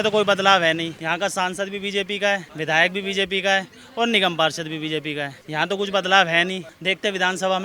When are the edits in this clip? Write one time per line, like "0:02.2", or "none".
0:01.0
0:02.5
0:05.4
0:06.7